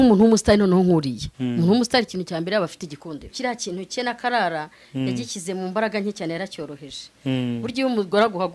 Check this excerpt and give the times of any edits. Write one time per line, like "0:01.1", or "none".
0:03.3